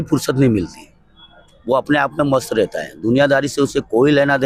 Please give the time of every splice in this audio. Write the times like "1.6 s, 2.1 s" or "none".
none